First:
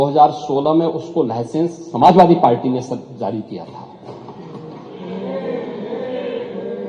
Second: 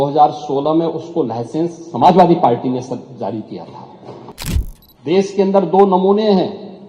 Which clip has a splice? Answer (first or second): second